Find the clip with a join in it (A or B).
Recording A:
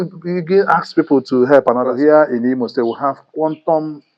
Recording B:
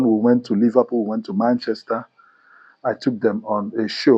A